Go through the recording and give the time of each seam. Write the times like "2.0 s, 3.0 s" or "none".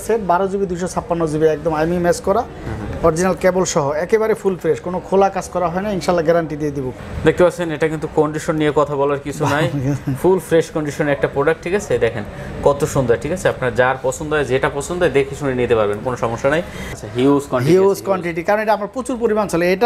6.9 s, 17.0 s